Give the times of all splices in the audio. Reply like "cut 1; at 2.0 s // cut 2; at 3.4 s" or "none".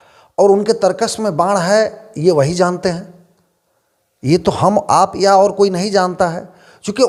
none